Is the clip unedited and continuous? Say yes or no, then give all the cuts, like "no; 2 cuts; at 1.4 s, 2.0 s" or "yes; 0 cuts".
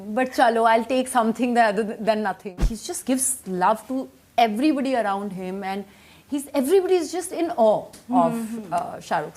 no; 1 cut; at 2.5 s